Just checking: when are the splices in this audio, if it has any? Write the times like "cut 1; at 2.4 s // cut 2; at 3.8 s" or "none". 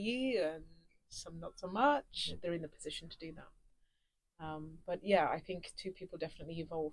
cut 1; at 2.4 s